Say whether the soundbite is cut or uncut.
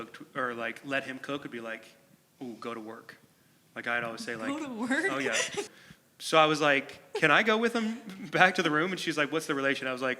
cut